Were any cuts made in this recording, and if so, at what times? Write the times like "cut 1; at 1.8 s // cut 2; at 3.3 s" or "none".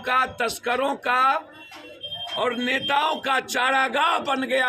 none